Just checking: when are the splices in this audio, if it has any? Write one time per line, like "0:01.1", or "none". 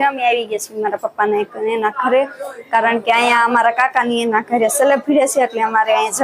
none